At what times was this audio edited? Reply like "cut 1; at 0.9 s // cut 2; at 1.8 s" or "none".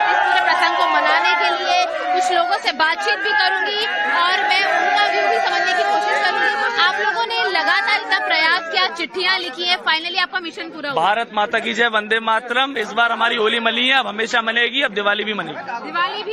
cut 1; at 1.1 s